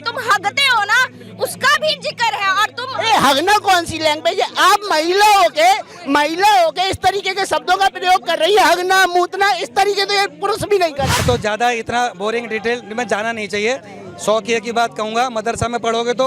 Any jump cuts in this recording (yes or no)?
yes